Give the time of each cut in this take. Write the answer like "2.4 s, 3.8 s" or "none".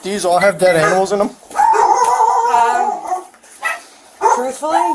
none